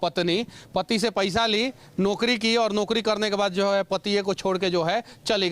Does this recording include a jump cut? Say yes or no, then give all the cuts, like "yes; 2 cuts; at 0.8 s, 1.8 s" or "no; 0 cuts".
no; 0 cuts